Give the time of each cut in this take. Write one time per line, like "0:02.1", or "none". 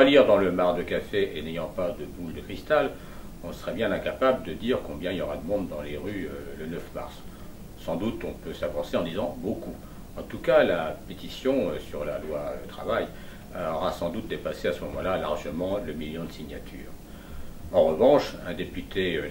0:17.1